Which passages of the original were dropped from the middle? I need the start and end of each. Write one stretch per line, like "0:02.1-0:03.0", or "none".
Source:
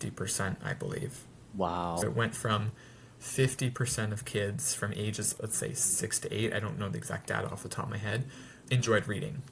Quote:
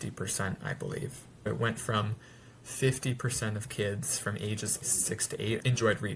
0:01.5-0:02.0
0:05.5-0:08.0